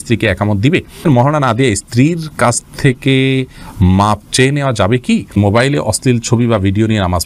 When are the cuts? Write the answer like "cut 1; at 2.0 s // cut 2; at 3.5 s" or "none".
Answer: cut 1; at 1.1 s // cut 2; at 5.3 s

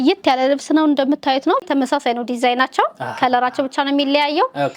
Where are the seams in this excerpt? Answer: cut 1; at 1.6 s

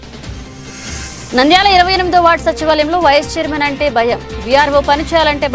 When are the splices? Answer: none

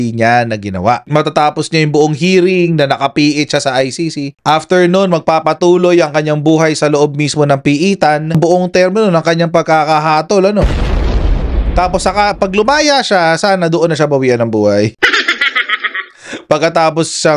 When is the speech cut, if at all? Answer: cut 1; at 1.0 s // cut 2; at 8.4 s

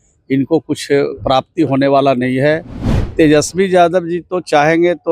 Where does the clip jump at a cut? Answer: cut 1; at 3.1 s

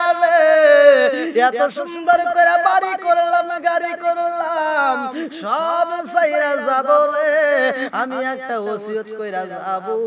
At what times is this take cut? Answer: none

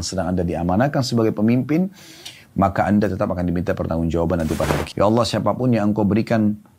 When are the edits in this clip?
cut 1; at 4.8 s

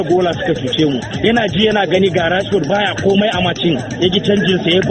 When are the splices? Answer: cut 1; at 1.1 s

